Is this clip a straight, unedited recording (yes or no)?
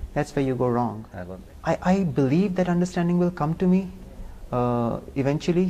no